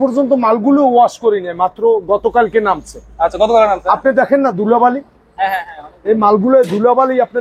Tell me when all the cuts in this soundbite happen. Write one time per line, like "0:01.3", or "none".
none